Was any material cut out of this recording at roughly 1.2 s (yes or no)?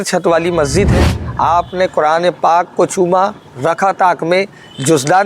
yes